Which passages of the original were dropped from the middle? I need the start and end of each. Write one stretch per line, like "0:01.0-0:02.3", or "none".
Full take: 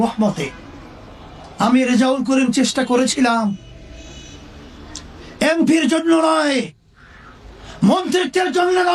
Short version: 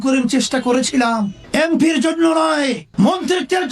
0:03.6-0:05.3
0:06.7-0:07.7